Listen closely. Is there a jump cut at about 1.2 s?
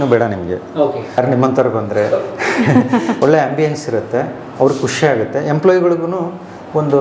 yes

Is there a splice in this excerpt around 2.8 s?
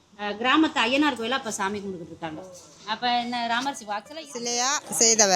no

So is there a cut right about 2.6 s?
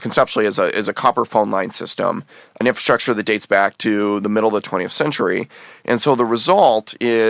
yes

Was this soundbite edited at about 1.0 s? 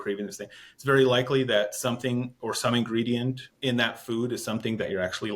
no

